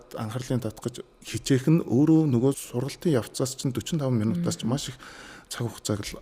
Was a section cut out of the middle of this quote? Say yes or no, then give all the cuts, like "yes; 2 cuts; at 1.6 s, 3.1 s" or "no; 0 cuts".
yes; 2 cuts; at 1.1 s, 2.7 s